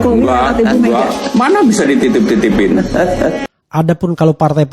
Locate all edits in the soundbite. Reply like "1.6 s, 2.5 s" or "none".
3.4 s